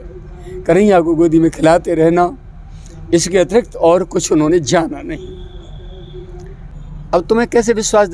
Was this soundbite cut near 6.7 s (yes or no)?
yes